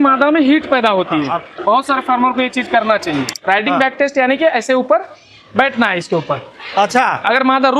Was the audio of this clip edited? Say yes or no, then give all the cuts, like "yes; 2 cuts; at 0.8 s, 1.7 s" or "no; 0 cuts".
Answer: yes; 2 cuts; at 1.6 s, 3.3 s